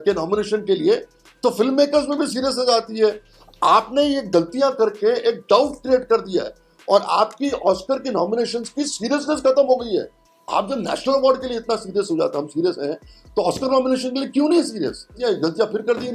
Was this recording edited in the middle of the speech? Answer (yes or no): yes